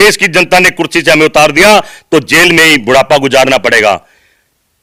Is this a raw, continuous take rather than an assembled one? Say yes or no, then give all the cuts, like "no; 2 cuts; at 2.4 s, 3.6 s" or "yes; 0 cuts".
yes; 0 cuts